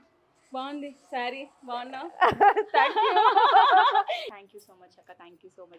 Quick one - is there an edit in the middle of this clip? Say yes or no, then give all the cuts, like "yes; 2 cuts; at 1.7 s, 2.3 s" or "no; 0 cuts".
yes; 1 cut; at 4.4 s